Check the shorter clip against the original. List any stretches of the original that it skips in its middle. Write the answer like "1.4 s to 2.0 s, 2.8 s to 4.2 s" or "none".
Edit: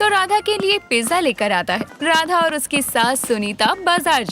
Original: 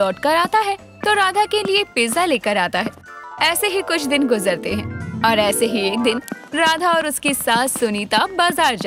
3.0 s to 6.4 s

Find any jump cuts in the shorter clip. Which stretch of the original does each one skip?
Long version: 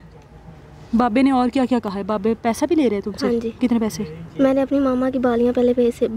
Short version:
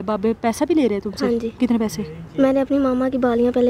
none

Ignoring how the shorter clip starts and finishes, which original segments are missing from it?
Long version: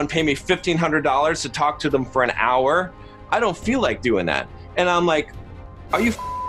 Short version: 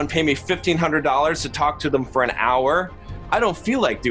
none

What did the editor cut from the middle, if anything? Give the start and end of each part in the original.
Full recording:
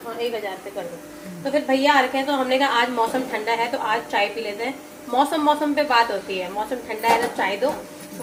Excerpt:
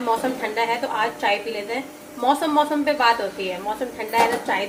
none

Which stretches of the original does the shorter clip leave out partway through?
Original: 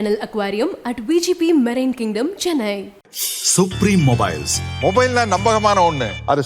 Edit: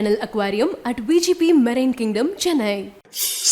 none

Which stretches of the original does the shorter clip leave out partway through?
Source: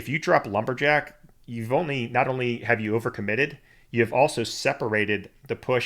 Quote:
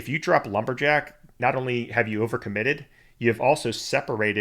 1.3 s to 2.0 s

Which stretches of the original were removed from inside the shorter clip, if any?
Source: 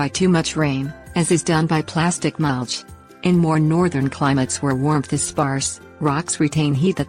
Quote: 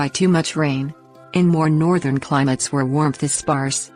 1.0 s to 2.9 s

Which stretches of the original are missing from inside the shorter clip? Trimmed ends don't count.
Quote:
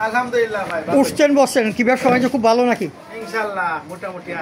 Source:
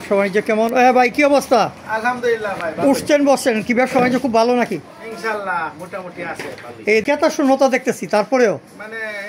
none

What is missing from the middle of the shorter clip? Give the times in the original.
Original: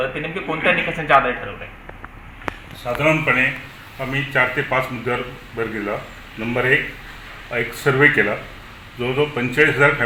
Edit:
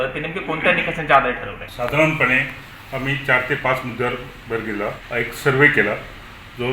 1.6 s to 2.7 s, 6.1 s to 7.4 s

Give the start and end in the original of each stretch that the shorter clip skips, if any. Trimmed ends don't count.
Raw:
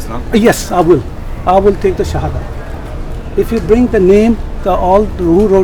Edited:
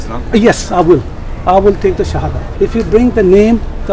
2.4 s to 3.1 s

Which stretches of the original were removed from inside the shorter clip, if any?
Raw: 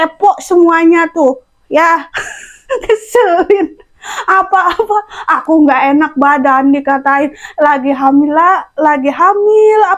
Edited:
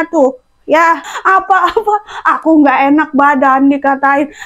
2.1 s to 4.1 s

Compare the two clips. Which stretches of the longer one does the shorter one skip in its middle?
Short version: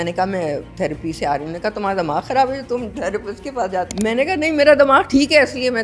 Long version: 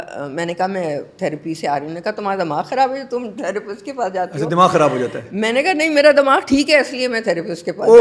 4.3 s to 5.3 s

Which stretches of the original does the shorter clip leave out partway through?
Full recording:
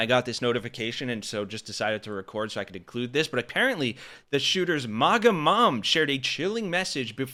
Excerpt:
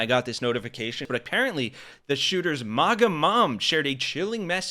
1.0 s to 3.3 s

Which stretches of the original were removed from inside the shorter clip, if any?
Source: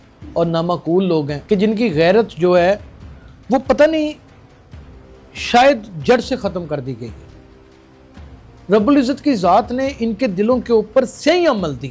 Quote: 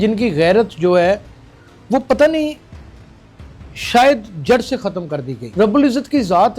7.0 s to 8.5 s

